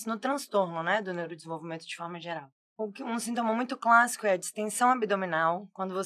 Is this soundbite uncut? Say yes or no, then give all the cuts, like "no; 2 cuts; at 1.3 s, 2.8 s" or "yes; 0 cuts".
no; 1 cut; at 2.6 s